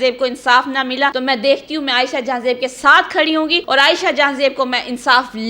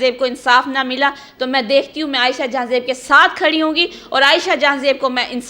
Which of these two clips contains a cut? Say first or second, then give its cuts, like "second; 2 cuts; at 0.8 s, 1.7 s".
first; 2 cuts; at 1.1 s, 3.6 s